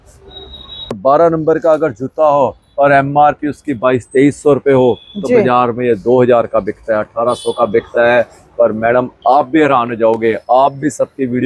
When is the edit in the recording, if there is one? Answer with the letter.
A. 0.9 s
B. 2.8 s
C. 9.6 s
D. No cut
A